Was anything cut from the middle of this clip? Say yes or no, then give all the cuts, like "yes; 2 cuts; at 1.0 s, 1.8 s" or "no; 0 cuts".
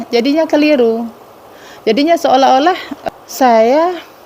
yes; 1 cut; at 2.9 s